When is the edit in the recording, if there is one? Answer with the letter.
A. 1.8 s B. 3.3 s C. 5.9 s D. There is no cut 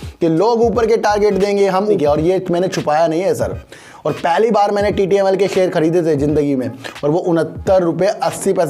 A